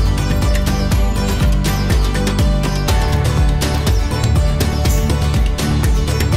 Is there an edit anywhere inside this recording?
no; 0 cuts

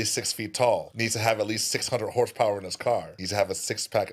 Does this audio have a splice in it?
yes; 2 cuts; at 0.9 s, 3.2 s

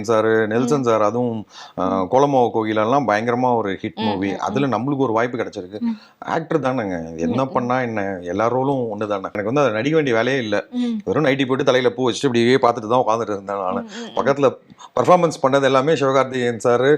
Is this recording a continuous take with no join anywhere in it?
no; 1 cut; at 9.4 s

